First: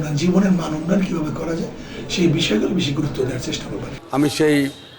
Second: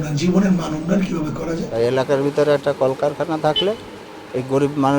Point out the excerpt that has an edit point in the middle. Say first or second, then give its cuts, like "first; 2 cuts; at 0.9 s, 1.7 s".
second; 1 cut; at 1.7 s